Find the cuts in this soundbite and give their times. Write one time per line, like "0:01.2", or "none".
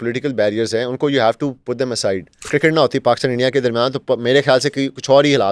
0:02.5